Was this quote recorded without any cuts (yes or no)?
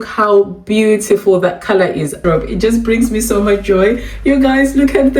no